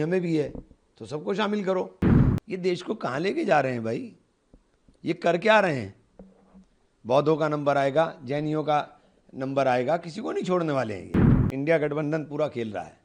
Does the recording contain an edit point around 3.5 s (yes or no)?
no